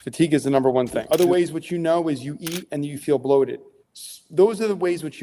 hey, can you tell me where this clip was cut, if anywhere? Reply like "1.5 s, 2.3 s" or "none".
1.0 s